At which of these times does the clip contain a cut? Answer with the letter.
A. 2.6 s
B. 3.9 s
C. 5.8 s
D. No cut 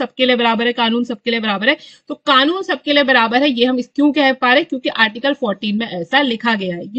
D